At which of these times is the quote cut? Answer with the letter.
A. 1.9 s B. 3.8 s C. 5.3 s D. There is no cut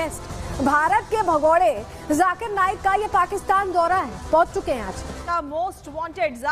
C